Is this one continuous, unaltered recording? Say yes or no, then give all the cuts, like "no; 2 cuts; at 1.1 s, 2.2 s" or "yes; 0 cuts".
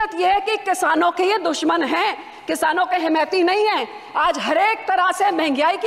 yes; 0 cuts